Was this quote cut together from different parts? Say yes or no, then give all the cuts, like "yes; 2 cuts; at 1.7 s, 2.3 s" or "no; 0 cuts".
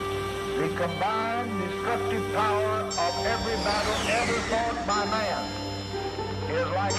no; 0 cuts